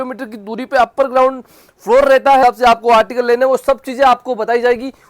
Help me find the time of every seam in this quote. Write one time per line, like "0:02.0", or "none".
0:02.4